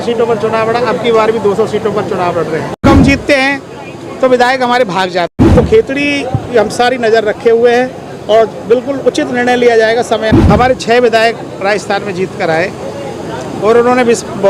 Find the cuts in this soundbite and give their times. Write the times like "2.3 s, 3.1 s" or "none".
2.8 s, 5.3 s, 10.3 s

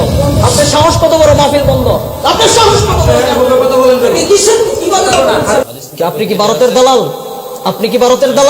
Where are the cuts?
5.6 s

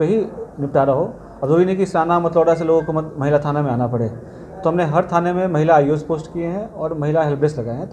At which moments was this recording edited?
none

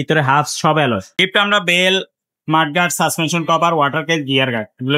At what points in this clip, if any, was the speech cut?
1.1 s

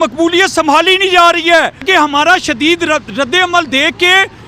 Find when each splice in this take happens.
1.9 s

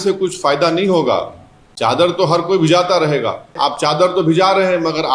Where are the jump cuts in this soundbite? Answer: 3.5 s

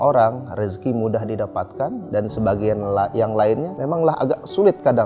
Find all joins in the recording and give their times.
3.7 s

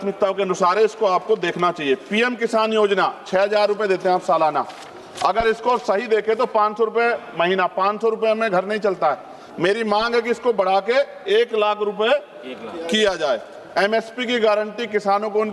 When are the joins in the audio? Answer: none

